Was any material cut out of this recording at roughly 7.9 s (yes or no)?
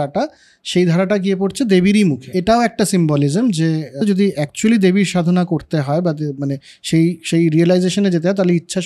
no